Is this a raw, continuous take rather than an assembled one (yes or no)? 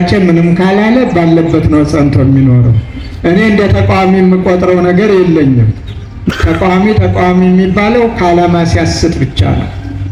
yes